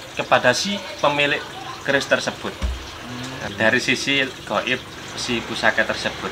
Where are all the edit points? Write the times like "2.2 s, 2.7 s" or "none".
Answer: 3.4 s